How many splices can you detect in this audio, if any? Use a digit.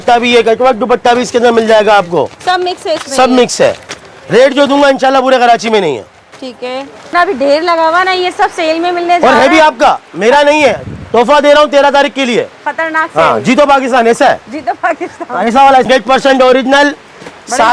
2